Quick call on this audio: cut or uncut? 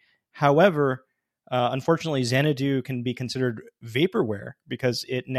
uncut